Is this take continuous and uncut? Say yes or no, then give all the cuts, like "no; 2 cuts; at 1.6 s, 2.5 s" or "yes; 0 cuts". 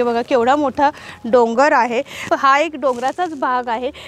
yes; 0 cuts